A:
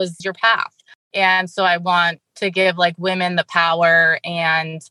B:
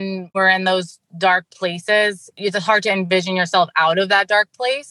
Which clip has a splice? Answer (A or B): B